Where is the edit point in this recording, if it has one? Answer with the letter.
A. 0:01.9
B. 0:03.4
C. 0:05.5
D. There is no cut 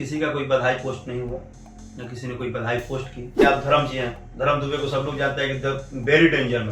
B